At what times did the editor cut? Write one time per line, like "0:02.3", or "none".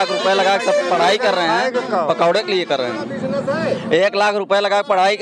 none